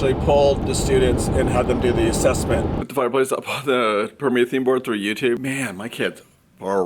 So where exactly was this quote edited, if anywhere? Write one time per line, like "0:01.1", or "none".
0:02.8
0:05.4